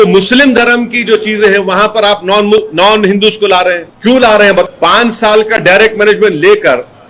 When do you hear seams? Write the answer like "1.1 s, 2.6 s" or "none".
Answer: 3.9 s, 4.7 s